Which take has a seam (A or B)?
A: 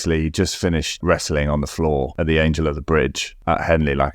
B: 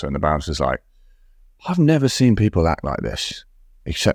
A